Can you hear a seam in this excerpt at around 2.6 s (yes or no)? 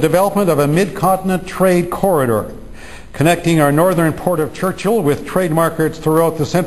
yes